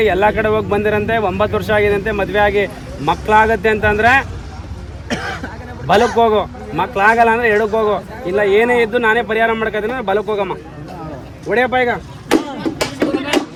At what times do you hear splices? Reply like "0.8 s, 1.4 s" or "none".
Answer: none